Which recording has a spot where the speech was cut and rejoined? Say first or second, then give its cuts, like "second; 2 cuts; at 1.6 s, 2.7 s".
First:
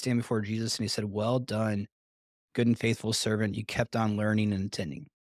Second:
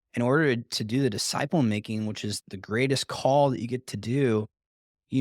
second; 1 cut; at 2.3 s